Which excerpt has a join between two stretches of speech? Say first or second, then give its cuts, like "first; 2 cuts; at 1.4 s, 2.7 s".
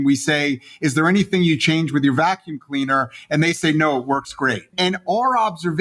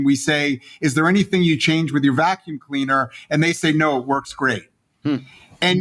first; 1 cut; at 4.7 s